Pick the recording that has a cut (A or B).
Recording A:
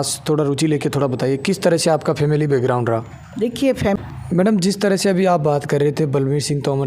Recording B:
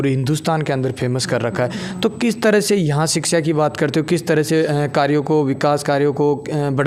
A